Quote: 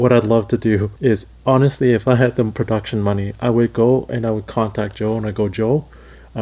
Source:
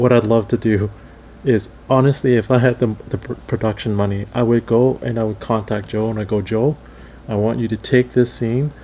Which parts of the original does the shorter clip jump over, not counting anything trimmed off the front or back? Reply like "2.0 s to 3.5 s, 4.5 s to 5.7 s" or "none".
0.9 s to 1.3 s, 3.0 s to 3.5 s